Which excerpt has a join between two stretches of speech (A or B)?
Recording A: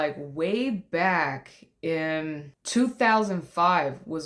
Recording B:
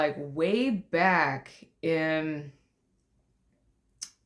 A